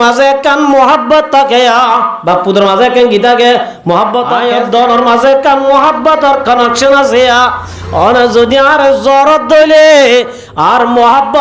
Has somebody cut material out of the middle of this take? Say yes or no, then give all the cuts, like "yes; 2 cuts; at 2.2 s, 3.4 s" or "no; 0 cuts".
yes; 1 cut; at 4.3 s